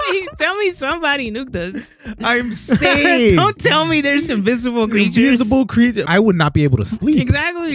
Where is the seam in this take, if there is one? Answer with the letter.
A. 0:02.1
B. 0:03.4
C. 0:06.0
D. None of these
C